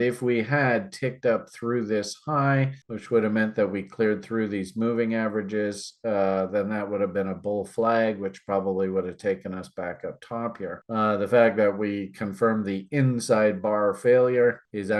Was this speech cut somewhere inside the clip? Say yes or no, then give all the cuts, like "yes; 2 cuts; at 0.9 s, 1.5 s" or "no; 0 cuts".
no; 0 cuts